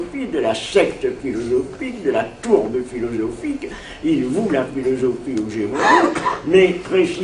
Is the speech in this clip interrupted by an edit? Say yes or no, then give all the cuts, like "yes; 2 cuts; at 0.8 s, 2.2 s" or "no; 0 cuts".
no; 0 cuts